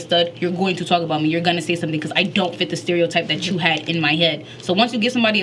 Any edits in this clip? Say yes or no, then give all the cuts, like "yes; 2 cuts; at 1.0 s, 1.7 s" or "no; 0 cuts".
no; 0 cuts